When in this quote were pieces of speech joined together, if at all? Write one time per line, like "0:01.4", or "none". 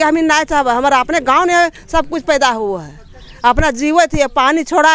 none